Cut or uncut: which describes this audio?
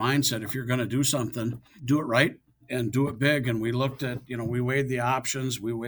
cut